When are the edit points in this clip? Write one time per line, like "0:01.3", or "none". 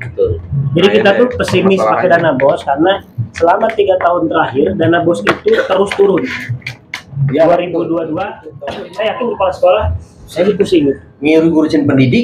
0:08.5